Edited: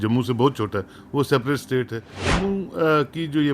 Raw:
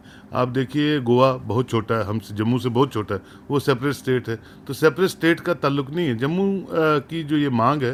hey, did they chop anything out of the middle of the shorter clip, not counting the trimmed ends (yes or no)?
yes